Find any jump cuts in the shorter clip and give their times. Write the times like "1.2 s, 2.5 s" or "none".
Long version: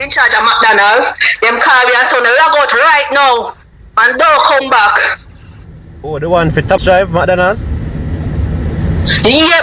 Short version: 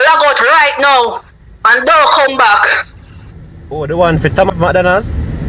4.5 s